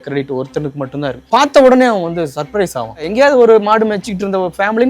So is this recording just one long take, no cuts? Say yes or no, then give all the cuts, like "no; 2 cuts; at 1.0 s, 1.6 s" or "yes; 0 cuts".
no; 2 cuts; at 1.2 s, 3.1 s